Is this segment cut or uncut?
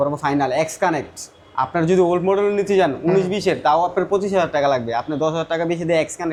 uncut